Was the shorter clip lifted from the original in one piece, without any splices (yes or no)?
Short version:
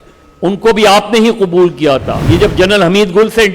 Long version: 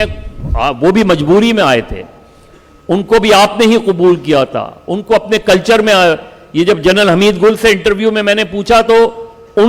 no